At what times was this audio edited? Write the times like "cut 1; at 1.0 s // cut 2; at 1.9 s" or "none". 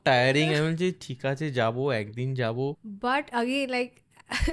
cut 1; at 2.9 s